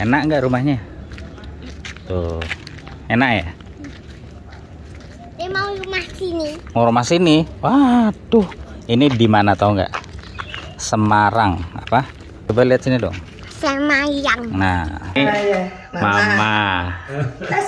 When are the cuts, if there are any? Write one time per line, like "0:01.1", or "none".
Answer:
0:12.4
0:15.2